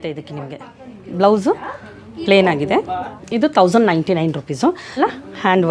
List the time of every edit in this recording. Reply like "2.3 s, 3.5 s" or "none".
3.2 s, 5.0 s